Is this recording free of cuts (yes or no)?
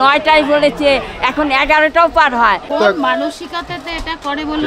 no